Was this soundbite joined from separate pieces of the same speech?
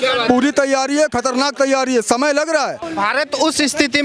yes; 1 cut; at 2.8 s

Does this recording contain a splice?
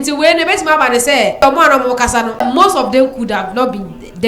yes; 2 cuts; at 1.4 s, 2.4 s

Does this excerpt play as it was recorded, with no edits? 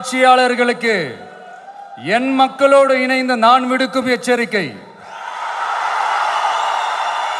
yes; 0 cuts

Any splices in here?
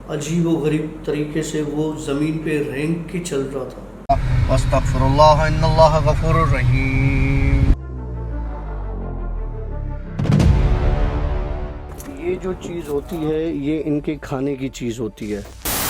yes; 1 cut; at 3.9 s

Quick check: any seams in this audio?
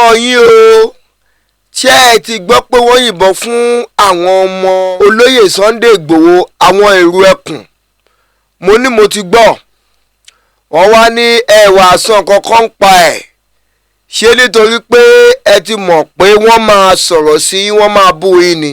yes; 1 cut; at 4.9 s

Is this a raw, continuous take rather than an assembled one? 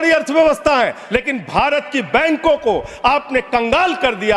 no; 1 cut; at 1.0 s

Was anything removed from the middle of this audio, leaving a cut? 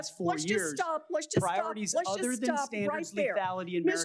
no; 0 cuts

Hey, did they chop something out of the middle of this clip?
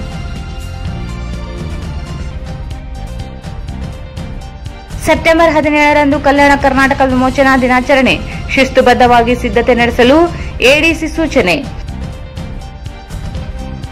yes; 1 cut; at 1.0 s

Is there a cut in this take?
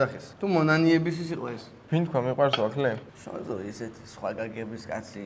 yes; 1 cut; at 3.1 s

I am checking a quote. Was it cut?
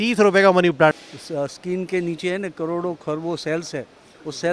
yes; 1 cut; at 1.0 s

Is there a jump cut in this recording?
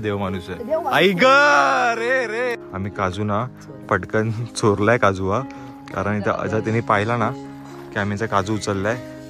yes; 1 cut; at 2.6 s

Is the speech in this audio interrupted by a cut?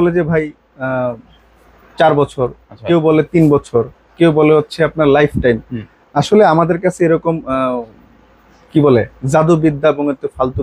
no; 0 cuts

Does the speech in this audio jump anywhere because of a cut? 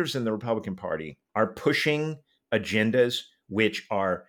yes; 1 cut; at 1.2 s

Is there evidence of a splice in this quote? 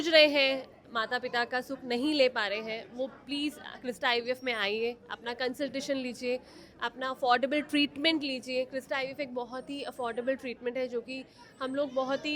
no; 0 cuts

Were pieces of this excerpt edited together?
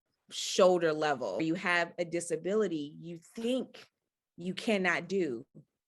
yes; 1 cut; at 1.4 s

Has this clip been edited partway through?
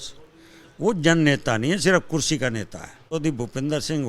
yes; 1 cut; at 2.6 s

